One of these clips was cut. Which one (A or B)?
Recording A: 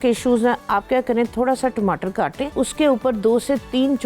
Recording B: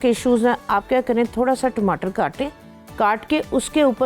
A